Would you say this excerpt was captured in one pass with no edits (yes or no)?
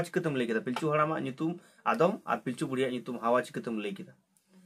yes